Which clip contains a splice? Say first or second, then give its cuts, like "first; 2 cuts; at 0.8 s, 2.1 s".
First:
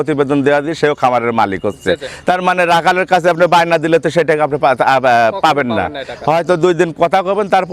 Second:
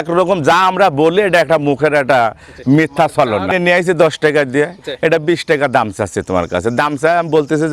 second; 1 cut; at 3.5 s